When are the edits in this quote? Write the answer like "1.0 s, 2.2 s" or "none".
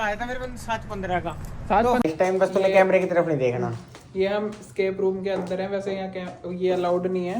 2.0 s